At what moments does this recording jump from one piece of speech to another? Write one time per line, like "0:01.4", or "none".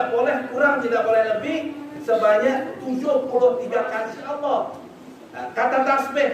0:04.1